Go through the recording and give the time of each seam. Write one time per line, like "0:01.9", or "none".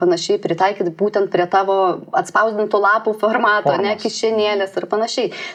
none